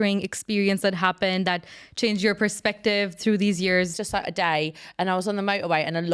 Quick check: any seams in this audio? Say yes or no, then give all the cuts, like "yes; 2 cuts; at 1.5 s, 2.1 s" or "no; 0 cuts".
yes; 1 cut; at 4.0 s